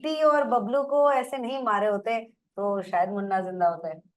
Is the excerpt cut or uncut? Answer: uncut